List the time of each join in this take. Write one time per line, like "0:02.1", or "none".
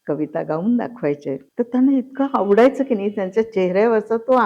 0:01.5